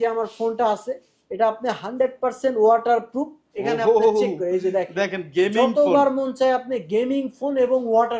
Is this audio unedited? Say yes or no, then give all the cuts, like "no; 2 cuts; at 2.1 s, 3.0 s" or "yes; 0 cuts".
yes; 0 cuts